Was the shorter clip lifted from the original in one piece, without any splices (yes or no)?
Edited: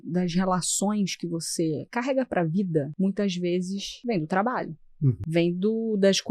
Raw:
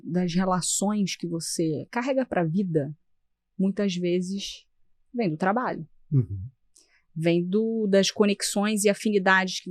no